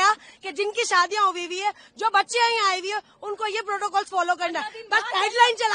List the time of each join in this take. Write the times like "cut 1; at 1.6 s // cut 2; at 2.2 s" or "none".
none

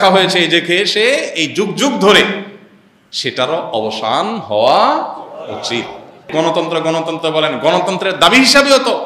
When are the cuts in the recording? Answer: cut 1; at 6.3 s

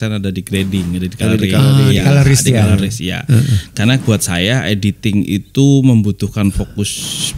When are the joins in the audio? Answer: none

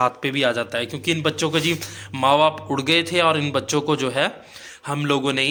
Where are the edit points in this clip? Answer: none

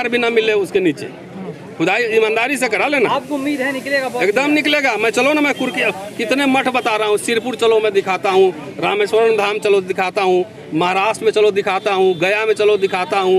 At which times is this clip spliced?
none

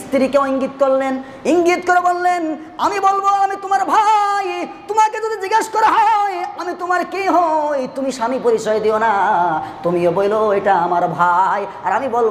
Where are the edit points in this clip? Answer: none

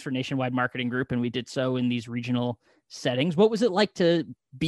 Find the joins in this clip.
none

